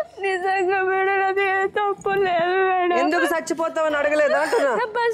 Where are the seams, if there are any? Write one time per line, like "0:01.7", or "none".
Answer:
none